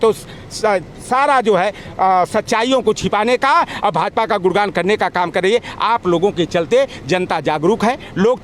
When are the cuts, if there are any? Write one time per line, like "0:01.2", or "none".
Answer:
none